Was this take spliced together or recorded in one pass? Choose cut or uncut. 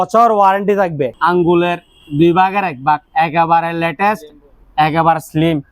cut